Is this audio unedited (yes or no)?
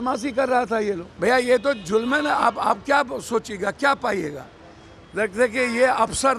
no